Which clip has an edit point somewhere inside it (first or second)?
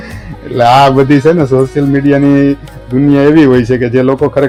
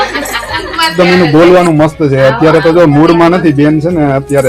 second